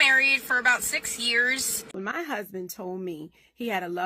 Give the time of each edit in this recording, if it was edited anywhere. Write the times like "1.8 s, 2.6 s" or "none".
1.8 s